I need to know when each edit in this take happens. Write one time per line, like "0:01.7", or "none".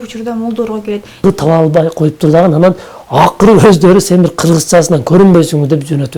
0:01.2

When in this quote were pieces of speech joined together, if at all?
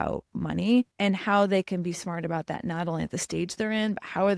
0:00.9

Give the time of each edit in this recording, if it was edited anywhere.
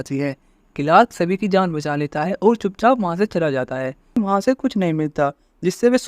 0:04.2

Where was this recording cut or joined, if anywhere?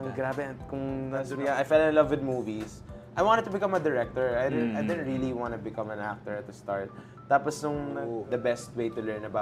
0:01.2
0:08.0

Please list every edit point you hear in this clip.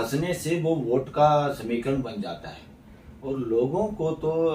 none

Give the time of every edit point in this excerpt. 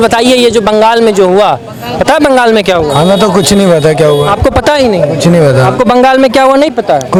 none

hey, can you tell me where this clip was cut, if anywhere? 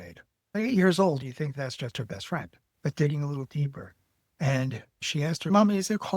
0:02.6
0:05.5

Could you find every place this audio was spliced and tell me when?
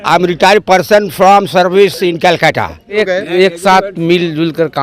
0:03.0

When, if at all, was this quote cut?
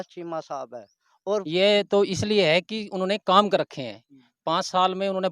0:01.5

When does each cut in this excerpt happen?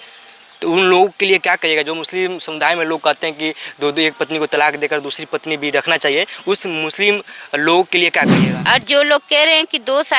0:08.4

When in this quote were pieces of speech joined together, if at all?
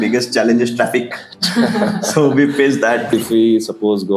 0:03.1

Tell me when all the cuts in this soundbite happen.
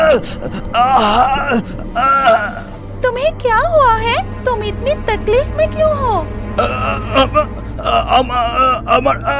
none

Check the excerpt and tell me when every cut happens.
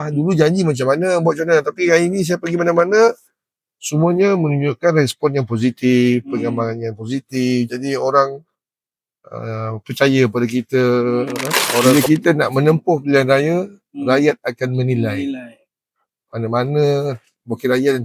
0:11.9

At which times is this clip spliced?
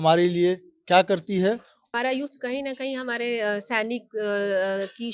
0:01.9

